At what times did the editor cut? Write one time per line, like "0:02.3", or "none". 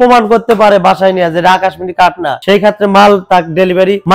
none